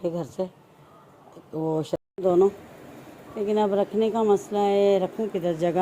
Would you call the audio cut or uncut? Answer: cut